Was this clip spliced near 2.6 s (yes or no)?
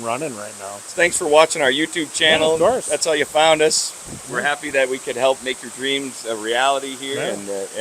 no